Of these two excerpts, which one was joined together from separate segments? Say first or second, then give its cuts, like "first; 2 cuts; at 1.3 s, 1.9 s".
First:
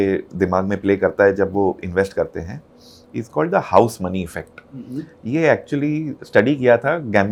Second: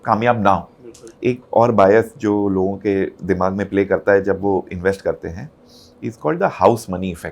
second; 1 cut; at 1.1 s